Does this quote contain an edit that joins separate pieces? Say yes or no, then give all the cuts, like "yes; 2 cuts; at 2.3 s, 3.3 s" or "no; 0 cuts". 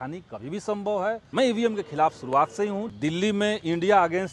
yes; 2 cuts; at 1.2 s, 2.9 s